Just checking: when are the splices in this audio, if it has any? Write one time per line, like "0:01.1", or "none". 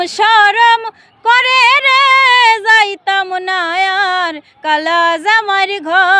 none

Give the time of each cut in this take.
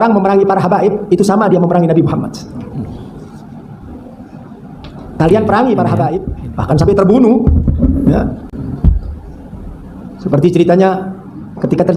0:06.2

